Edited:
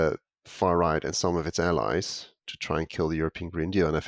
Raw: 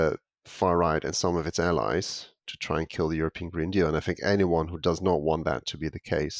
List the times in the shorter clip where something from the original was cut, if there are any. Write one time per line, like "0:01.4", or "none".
none